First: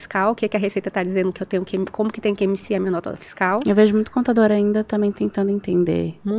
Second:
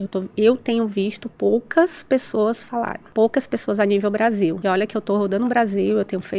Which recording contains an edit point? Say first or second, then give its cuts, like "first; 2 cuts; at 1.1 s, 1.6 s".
second; 3 cuts; at 1.2 s, 3.0 s, 4.6 s